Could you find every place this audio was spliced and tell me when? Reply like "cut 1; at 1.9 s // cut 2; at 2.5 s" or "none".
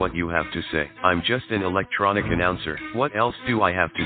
none